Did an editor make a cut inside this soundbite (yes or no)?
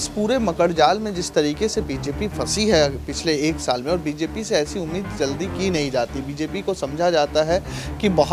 no